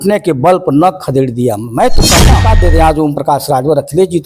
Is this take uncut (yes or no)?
no